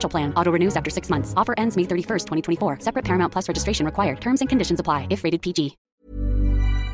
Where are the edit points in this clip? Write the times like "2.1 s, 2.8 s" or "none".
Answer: 6.0 s